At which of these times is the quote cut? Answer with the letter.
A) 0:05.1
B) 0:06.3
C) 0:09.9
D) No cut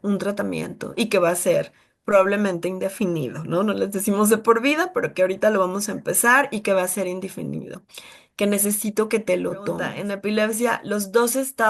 C